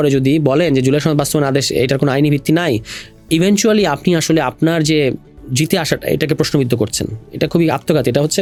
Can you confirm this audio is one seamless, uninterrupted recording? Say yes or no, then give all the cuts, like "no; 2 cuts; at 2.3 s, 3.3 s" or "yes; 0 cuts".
yes; 0 cuts